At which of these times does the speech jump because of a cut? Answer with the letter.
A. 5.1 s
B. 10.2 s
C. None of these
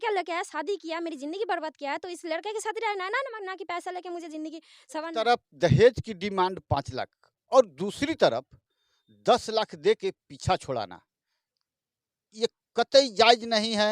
A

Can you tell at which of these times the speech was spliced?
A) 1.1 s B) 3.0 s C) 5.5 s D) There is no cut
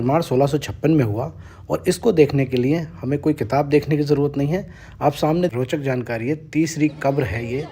C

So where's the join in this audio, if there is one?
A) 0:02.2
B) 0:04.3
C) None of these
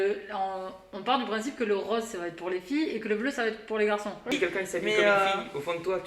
B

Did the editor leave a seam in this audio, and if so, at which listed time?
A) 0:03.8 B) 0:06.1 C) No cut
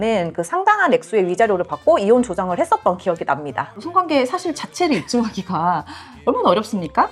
A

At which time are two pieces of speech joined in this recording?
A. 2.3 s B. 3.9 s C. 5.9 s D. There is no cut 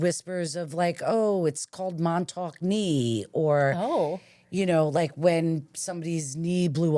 D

